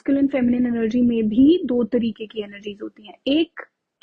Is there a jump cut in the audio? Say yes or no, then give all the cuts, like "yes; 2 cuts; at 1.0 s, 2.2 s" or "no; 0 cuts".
no; 0 cuts